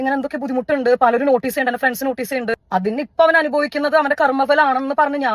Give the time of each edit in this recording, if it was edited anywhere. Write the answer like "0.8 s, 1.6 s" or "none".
2.6 s